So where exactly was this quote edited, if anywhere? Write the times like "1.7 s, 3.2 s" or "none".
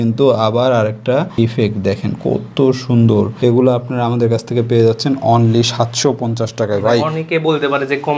none